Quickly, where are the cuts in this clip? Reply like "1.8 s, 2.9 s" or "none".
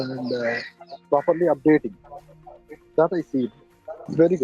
none